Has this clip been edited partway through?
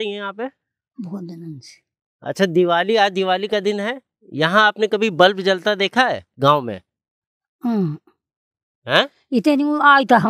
no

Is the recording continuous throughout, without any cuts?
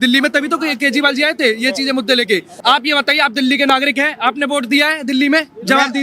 no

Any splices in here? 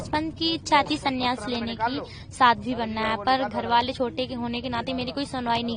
no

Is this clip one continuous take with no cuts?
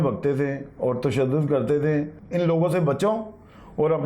no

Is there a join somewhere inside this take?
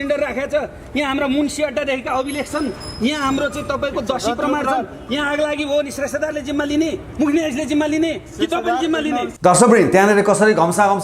no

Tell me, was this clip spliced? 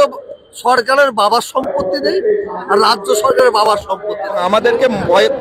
yes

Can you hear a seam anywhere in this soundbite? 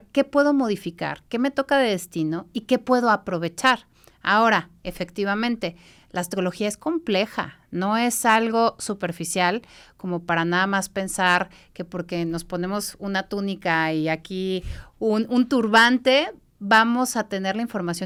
no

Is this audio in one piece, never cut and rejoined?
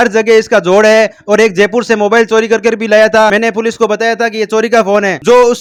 yes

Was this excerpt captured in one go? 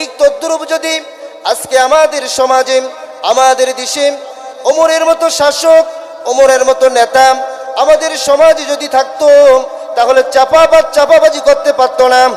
yes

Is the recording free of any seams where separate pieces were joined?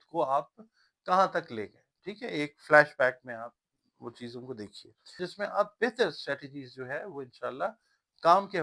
no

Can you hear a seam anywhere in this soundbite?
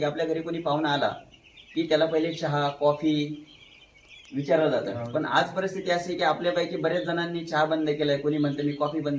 no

